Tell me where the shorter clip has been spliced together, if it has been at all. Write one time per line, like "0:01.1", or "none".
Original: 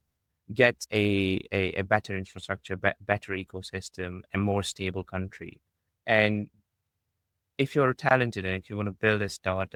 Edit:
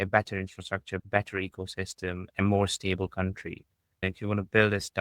0:01.0
0:04.0